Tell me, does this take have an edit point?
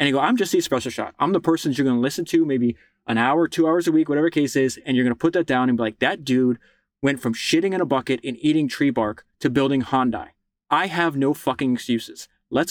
no; 0 cuts

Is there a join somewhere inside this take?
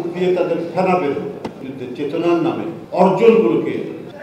yes; 2 cuts; at 1.6 s, 2.8 s

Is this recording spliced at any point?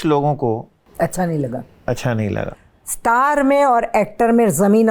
yes; 1 cut; at 2.5 s

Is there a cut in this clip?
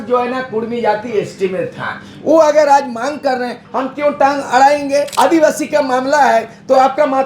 yes; 1 cut; at 5.1 s

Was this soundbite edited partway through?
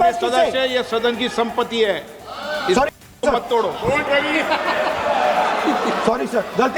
no; 0 cuts

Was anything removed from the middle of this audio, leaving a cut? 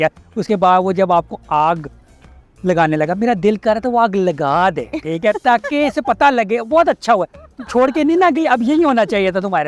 no; 0 cuts

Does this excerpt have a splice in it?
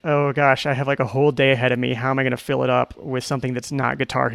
no; 0 cuts

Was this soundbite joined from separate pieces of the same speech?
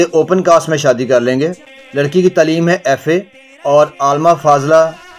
yes; 1 cut; at 2.1 s

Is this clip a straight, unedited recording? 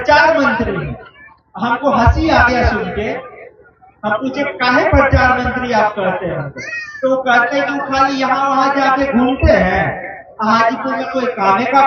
yes; 0 cuts

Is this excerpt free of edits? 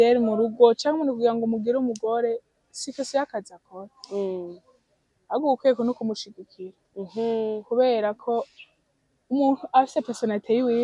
yes; 0 cuts

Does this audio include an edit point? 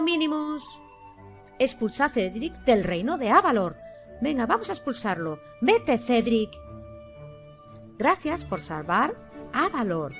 no; 0 cuts

